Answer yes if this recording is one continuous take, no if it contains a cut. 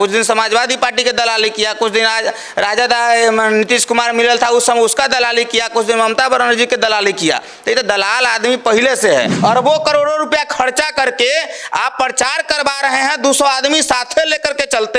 no